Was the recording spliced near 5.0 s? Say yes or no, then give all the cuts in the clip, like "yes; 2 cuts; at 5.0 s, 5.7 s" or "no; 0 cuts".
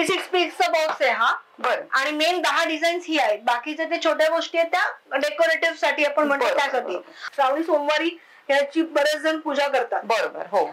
no; 1 cut; at 7.2 s